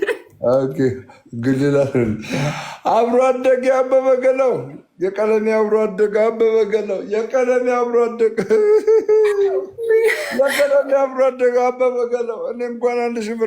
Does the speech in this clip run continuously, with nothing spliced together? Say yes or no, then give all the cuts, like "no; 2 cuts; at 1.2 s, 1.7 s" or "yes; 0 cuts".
yes; 0 cuts